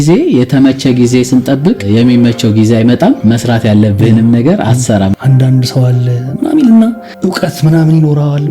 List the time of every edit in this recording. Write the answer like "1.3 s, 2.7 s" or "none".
1.8 s, 3.2 s, 5.2 s

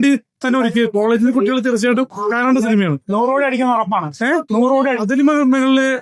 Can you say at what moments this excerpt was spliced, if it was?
none

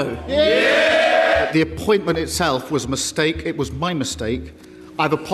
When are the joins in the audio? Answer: 1.5 s

